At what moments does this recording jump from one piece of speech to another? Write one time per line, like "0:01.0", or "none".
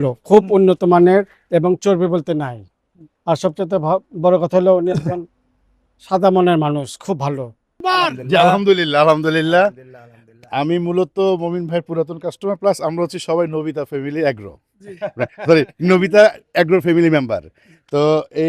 0:07.8

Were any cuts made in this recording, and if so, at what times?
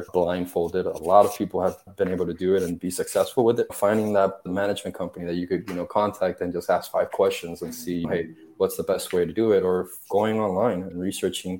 0:04.5

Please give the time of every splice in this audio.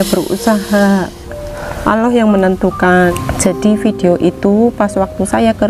0:03.1

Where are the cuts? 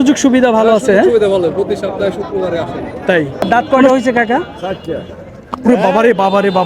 0:03.5

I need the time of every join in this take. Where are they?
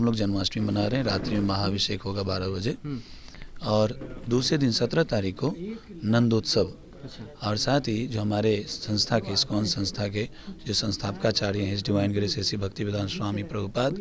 none

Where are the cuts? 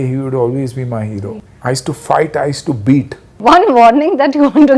0:01.4
0:03.2

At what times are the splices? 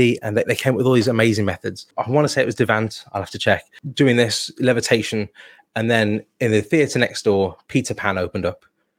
0:01.8
0:03.8

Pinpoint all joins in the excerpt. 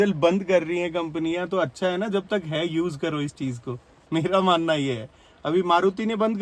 none

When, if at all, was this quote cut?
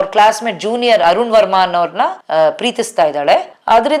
none

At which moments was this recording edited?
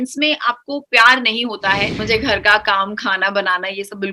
0:02.0

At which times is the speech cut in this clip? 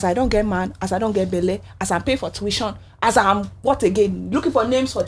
none

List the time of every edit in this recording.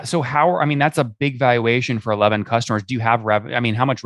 none

